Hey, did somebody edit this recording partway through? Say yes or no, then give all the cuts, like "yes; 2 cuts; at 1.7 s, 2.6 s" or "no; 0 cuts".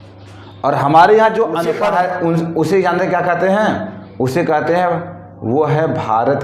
yes; 1 cut; at 1.7 s